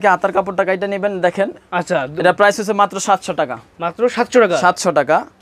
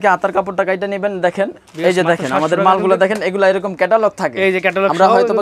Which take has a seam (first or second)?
second